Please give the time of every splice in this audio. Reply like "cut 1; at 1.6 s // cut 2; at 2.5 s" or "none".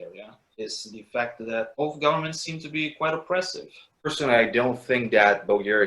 cut 1; at 4.0 s